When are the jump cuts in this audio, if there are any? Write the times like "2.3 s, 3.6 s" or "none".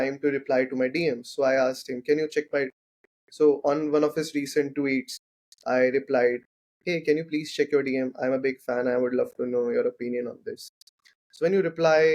none